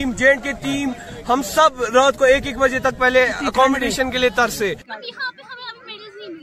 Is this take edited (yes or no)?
no